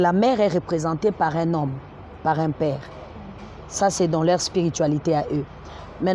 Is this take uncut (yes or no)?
yes